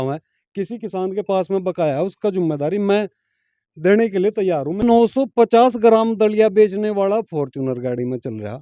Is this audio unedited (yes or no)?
no